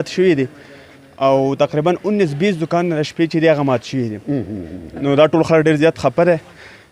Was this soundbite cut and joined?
no; 0 cuts

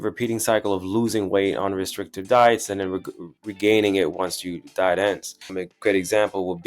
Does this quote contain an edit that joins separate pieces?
yes; 1 cut; at 5.5 s

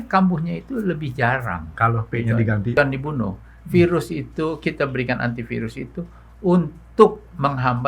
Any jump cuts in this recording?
yes; 1 cut; at 2.7 s

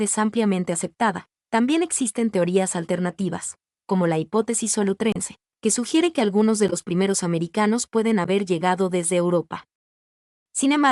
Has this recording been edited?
no; 0 cuts

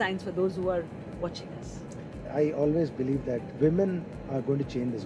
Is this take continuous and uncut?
no; 2 cuts; at 2.3 s, 3.5 s

